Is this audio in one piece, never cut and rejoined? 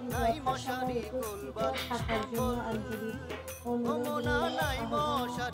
yes; 0 cuts

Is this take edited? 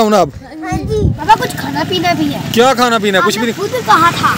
yes; 1 cut; at 1.3 s

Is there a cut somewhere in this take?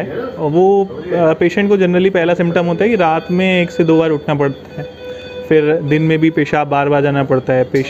no; 0 cuts

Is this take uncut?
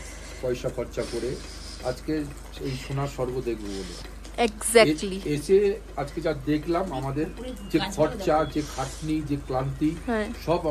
yes; 0 cuts

